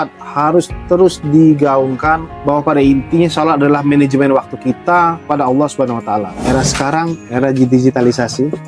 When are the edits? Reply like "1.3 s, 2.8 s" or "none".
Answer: 2.3 s, 5.2 s, 6.3 s